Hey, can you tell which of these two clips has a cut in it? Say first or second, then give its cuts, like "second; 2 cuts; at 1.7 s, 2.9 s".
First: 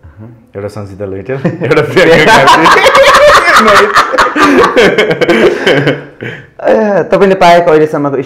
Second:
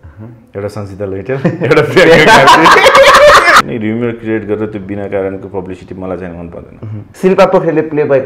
second; 2 cuts; at 3.6 s, 7.0 s